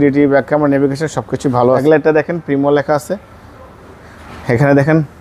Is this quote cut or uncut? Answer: cut